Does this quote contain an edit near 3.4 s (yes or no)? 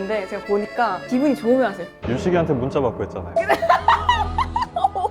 no